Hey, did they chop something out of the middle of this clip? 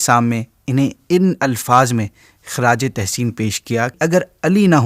yes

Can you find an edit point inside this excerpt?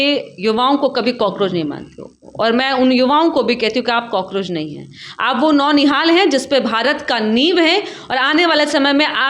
no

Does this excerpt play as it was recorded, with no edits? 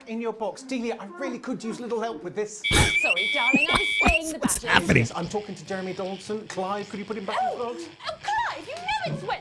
yes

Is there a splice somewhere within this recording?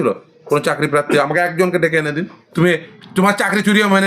yes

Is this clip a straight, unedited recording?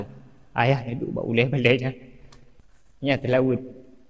yes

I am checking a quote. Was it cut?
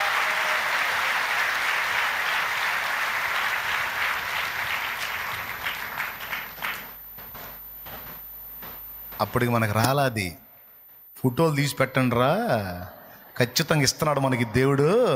no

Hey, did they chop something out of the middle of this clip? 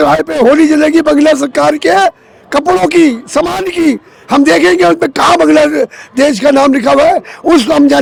no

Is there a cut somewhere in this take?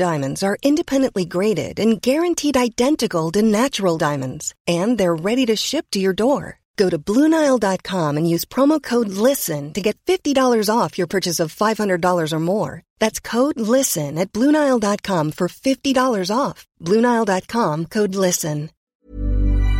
yes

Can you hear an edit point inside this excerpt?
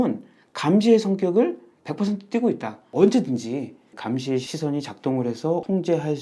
yes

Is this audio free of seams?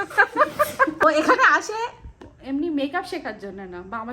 no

